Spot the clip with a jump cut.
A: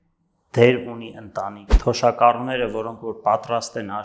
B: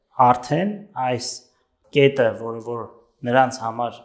A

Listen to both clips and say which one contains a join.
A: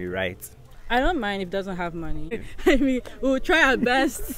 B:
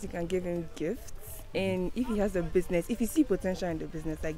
A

